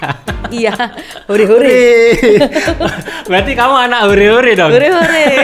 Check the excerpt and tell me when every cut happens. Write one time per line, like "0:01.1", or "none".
none